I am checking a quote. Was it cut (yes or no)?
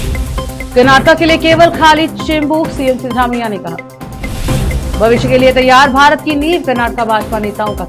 no